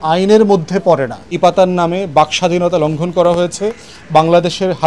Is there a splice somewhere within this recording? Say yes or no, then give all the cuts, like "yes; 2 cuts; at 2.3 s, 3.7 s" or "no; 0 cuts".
yes; 1 cut; at 1.3 s